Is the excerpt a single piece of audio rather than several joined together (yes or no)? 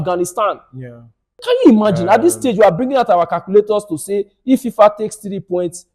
no